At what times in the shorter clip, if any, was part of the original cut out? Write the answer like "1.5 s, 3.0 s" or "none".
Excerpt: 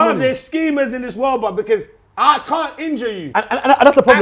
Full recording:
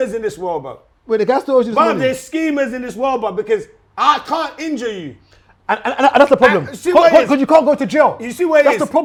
3.2 s